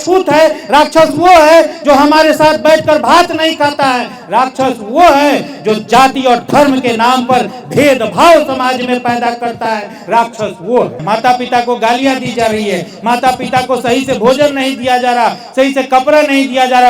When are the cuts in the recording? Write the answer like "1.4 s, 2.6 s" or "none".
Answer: 11.0 s